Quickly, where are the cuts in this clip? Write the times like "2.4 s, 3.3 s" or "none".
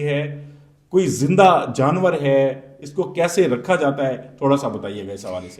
none

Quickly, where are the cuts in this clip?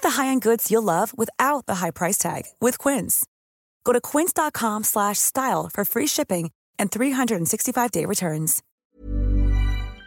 8.6 s

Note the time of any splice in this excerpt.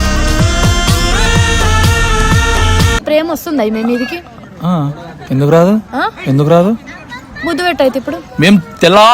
2.9 s

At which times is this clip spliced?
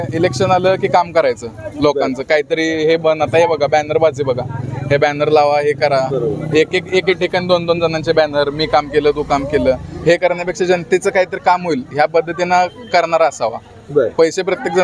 none

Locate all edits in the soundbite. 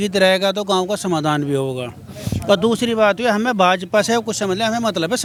none

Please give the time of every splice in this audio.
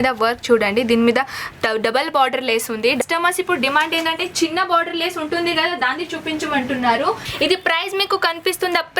3.0 s, 7.3 s

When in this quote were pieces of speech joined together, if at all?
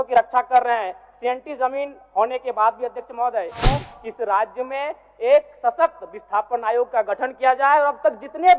3.9 s

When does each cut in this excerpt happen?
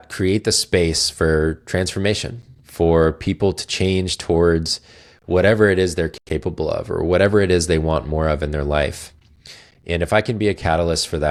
none

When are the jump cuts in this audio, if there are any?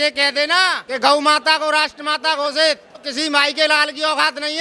0.8 s, 3.1 s

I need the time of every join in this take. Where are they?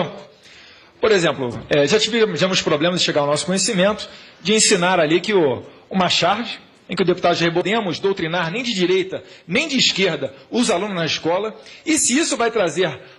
none

